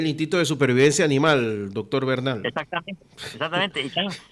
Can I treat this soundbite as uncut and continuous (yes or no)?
yes